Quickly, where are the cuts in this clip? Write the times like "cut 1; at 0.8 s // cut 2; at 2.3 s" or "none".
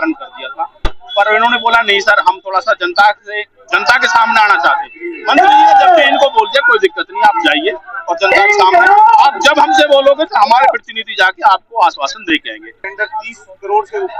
cut 1; at 12.8 s